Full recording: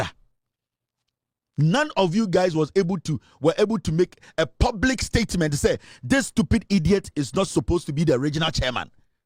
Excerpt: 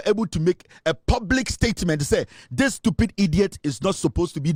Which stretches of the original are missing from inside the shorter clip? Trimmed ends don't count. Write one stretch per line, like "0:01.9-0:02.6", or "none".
none